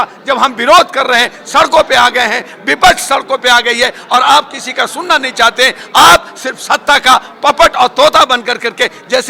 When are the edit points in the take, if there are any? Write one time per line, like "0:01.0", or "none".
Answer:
none

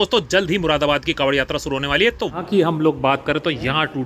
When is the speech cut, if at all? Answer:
0:02.3

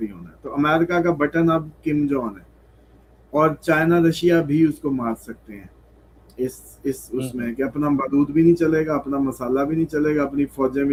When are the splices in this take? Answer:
none

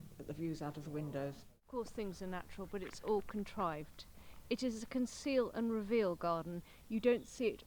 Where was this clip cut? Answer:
0:01.5

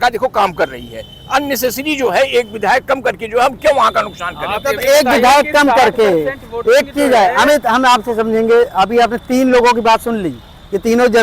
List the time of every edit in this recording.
none

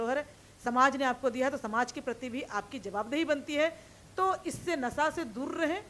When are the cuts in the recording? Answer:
none

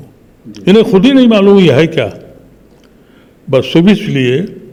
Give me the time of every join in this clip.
none

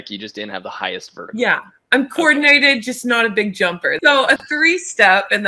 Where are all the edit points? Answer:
0:04.0

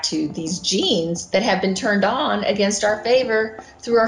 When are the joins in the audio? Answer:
none

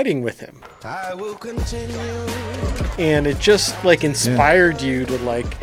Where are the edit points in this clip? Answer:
0:02.8

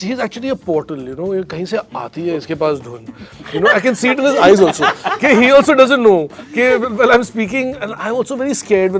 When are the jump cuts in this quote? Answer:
none

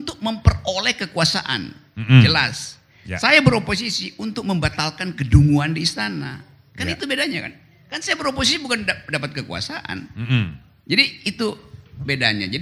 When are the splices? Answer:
none

